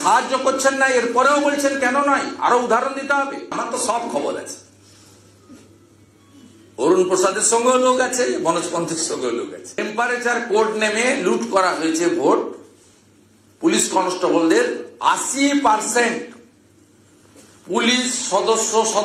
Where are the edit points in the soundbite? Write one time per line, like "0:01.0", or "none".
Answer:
0:03.5
0:09.8